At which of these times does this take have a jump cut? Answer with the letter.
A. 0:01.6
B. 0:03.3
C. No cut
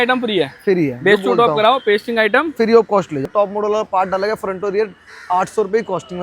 B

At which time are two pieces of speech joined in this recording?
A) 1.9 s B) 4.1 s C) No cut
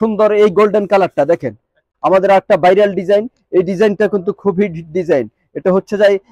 A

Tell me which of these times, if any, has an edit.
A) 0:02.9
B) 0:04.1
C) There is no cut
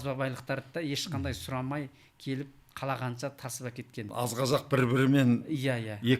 B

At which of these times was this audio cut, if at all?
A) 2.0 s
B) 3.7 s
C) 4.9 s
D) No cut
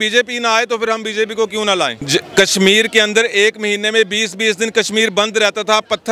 A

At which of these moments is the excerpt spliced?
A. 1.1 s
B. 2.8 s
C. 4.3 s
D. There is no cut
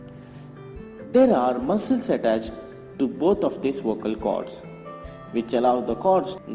A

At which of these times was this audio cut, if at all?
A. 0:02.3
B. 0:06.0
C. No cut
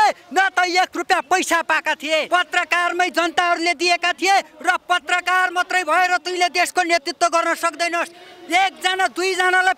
A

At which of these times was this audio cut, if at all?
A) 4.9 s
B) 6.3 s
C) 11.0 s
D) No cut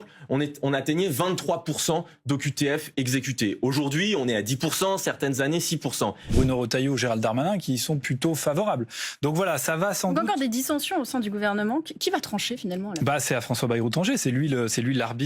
B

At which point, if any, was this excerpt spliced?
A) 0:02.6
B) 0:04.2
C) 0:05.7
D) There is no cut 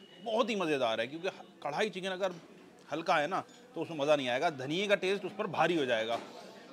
D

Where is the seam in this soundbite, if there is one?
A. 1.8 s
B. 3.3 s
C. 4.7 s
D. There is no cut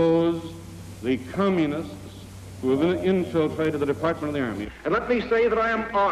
C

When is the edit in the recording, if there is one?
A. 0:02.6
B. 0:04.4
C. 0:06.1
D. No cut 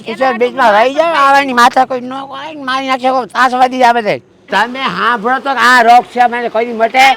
B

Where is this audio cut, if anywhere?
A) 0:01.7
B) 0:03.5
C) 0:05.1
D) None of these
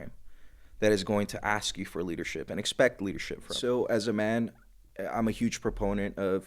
B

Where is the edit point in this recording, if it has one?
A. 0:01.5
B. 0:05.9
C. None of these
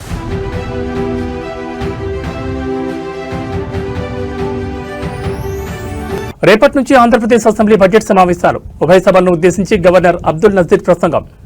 B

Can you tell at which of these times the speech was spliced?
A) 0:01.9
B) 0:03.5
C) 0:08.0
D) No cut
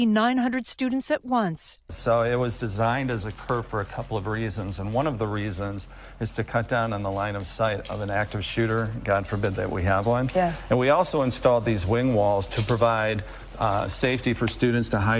A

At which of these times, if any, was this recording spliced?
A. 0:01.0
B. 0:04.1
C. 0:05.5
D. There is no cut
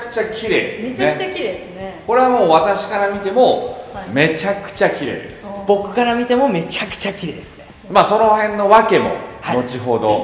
D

